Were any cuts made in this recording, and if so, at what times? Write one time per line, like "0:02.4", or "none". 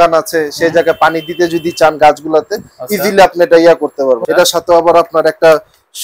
0:04.2